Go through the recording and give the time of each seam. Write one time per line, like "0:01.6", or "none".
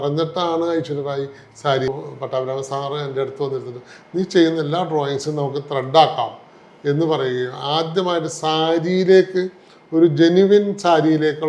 0:01.9